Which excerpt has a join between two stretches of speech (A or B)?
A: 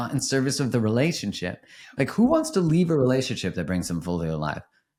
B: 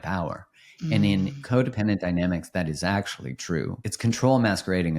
B